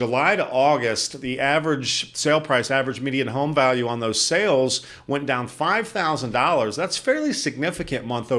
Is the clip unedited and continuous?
yes; 0 cuts

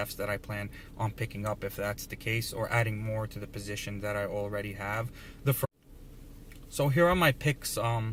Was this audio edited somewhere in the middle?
no; 0 cuts

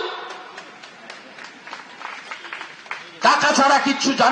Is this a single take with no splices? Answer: yes; 0 cuts

